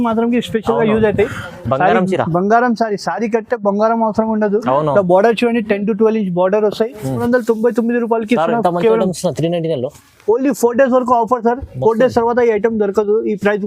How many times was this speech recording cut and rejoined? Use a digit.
1